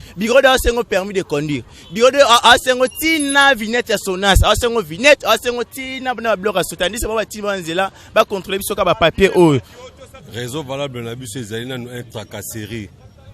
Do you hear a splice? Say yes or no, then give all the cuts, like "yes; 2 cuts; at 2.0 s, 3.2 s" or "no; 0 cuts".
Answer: yes; 1 cut; at 10.3 s